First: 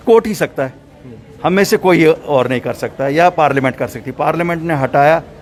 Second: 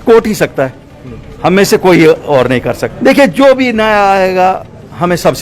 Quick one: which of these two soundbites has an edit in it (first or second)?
second